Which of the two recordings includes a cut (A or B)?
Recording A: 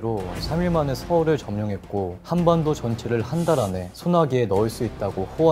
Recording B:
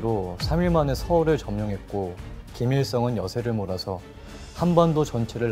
A